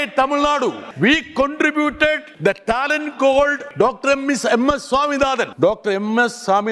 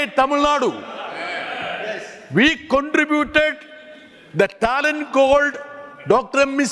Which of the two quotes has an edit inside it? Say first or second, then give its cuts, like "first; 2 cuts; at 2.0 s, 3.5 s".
first; 4 cuts; at 0.9 s, 2.3 s, 3.6 s, 5.5 s